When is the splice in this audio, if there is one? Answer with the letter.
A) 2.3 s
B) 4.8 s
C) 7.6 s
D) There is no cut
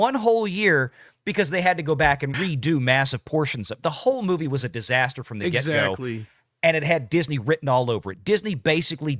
A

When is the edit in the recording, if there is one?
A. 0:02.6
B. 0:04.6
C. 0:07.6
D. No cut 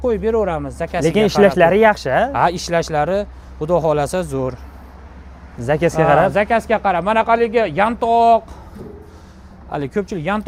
D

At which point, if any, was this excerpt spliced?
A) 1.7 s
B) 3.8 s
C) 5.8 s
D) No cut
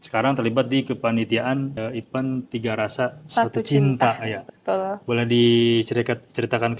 A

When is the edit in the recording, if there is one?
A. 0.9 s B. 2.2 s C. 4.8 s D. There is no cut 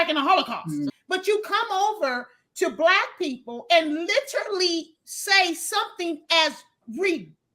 A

